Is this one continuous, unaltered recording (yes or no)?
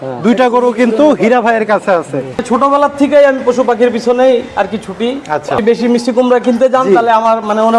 no